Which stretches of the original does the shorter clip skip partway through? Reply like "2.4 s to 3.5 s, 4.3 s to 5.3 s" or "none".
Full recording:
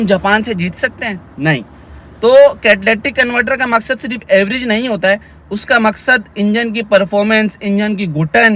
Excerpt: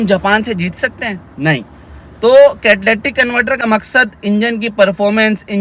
3.6 s to 5.8 s